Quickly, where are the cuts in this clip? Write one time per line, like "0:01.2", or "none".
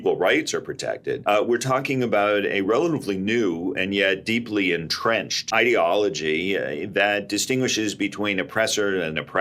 0:01.2
0:05.5